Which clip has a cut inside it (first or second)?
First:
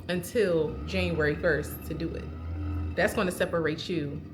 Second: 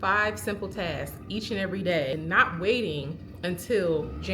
second